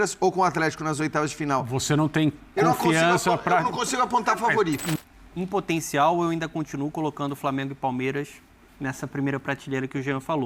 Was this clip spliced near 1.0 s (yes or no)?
no